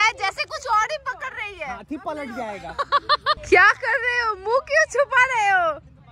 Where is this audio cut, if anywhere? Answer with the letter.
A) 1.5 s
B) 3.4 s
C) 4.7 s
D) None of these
B